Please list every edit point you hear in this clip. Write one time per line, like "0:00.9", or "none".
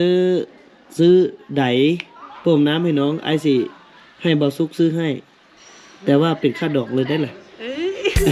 none